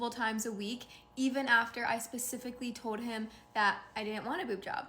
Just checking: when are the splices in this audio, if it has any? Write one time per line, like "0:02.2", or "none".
0:01.7